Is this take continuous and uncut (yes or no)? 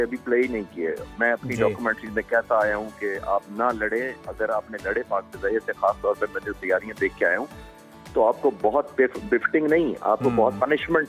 yes